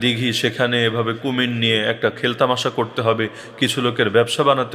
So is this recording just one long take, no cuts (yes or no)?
yes